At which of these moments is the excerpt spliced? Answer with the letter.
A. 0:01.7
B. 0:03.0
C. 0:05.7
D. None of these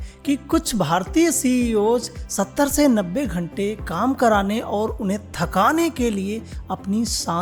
D